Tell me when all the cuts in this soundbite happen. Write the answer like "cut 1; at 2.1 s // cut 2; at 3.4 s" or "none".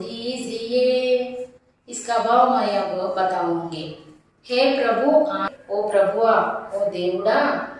cut 1; at 5.5 s

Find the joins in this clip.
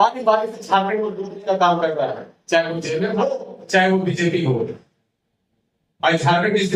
none

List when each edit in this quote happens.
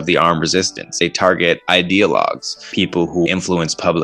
cut 1; at 0.9 s // cut 2; at 3.1 s

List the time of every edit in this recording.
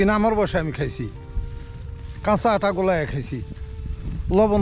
none

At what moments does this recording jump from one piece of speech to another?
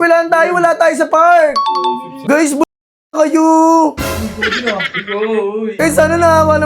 cut 1; at 2.3 s // cut 2; at 5.8 s

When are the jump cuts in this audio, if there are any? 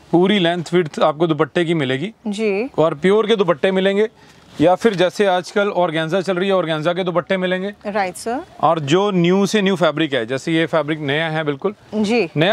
none

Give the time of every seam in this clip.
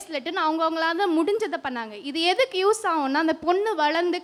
none

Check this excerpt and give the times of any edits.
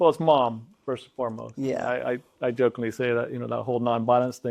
none

